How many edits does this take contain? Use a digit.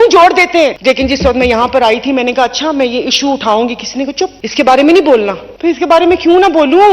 3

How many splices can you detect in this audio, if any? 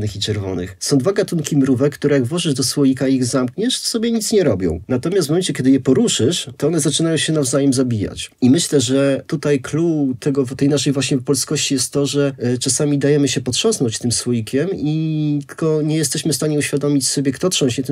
0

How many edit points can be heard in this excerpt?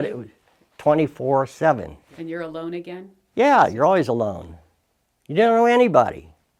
1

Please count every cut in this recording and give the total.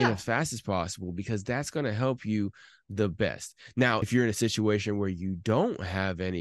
1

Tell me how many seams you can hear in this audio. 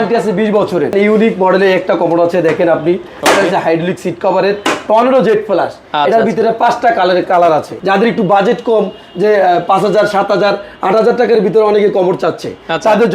2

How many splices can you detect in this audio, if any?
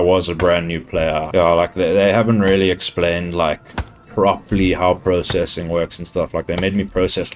2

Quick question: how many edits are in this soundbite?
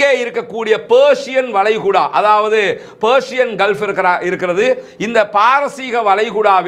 0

